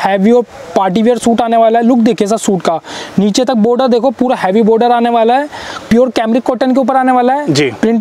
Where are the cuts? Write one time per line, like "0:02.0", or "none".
0:05.7

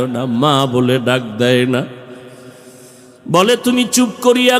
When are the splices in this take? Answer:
none

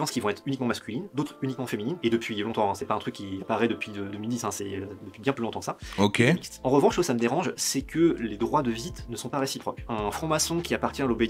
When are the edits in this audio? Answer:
none

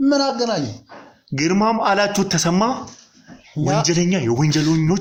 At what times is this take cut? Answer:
none

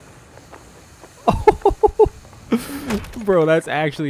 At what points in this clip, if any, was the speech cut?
none

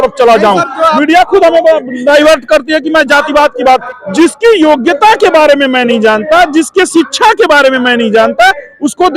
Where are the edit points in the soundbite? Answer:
0:03.8

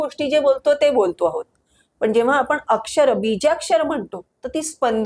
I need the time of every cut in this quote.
none

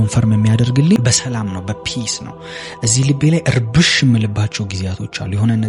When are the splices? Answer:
0:01.0

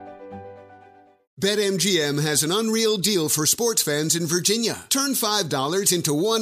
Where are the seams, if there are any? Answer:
0:01.2

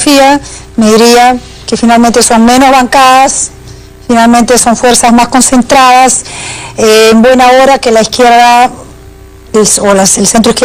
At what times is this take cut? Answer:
none

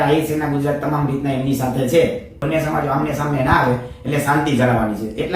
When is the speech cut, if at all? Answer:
0:02.4

